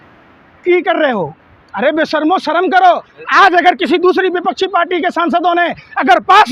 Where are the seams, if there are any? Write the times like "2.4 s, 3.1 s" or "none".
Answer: none